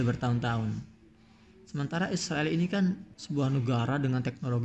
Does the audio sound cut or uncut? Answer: cut